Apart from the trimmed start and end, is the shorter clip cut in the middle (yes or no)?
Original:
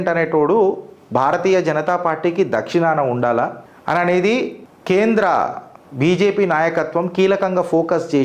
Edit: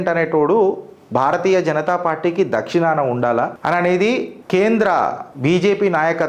yes